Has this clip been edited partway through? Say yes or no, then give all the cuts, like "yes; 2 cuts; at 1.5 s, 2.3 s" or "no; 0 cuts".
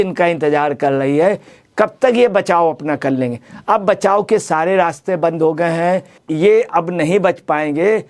yes; 1 cut; at 6.2 s